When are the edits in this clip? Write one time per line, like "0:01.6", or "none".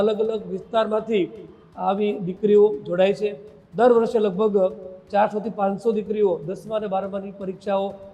none